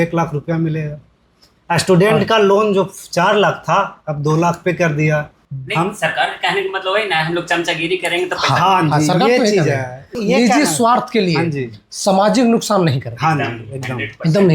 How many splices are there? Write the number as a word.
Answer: two